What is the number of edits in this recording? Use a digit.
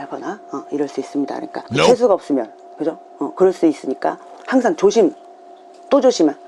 1